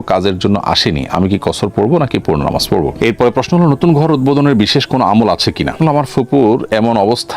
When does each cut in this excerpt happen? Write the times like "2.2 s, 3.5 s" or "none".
2.9 s, 5.8 s

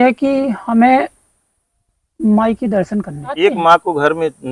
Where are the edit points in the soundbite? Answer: 3.4 s

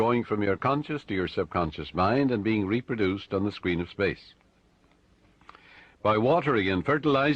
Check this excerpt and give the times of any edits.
1.3 s

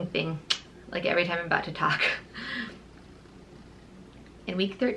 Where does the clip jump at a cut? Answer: none

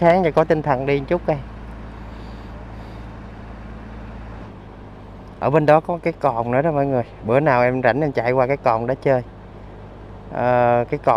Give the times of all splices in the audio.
4.5 s

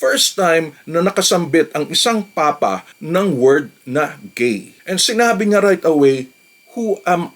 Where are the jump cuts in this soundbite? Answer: 2.9 s, 4.7 s

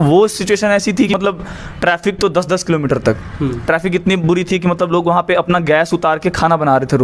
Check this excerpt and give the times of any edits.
1.1 s

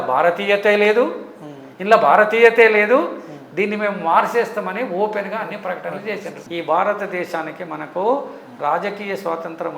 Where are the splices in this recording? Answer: 6.4 s

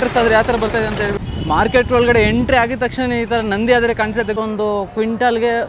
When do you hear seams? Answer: 1.2 s, 4.4 s

